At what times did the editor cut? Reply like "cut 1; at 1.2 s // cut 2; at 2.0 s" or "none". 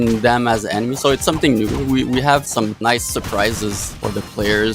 cut 1; at 2.6 s // cut 2; at 3.9 s